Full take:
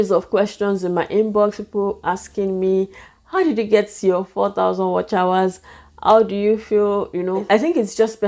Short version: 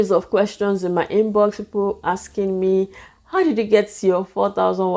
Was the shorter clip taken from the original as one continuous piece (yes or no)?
yes